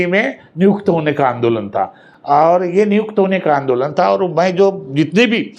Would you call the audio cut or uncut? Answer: uncut